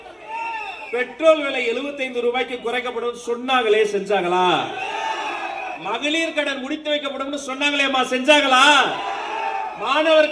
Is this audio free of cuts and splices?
yes; 0 cuts

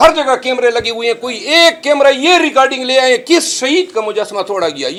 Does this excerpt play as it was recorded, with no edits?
yes; 0 cuts

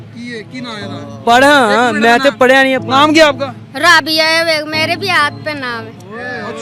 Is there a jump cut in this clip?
no; 0 cuts

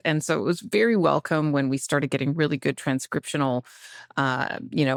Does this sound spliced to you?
no; 0 cuts

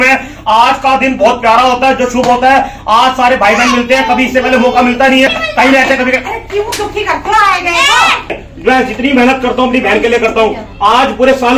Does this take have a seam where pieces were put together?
yes; 2 cuts; at 5.3 s, 8.4 s

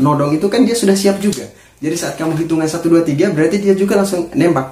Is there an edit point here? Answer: no; 0 cuts

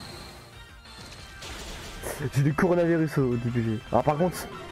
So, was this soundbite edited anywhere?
no; 0 cuts

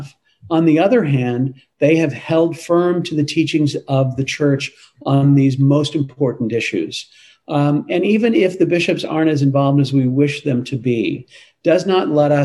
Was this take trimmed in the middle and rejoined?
no; 0 cuts

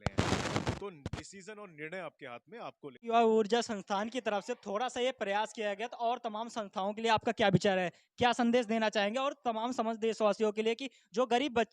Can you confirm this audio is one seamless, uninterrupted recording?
no; 1 cut; at 3.1 s

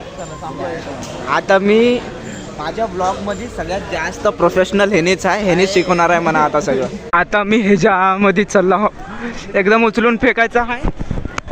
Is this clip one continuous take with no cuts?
no; 1 cut; at 7.0 s

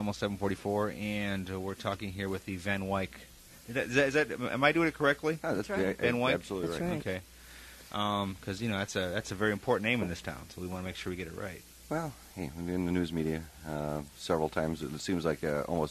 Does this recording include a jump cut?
no; 0 cuts

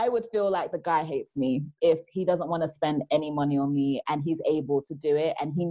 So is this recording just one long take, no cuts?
yes; 0 cuts

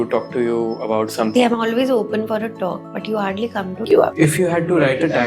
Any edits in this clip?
yes; 3 cuts; at 1.3 s, 2.9 s, 4.0 s

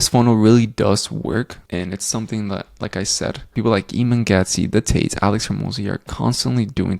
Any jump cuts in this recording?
no; 0 cuts

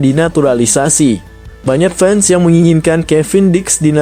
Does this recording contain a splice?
no; 0 cuts

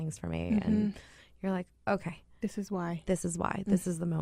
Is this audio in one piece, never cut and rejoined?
yes; 0 cuts

